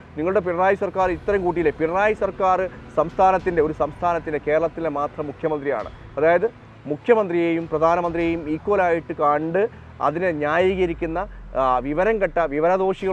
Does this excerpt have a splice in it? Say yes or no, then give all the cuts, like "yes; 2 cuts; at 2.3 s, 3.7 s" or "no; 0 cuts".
no; 0 cuts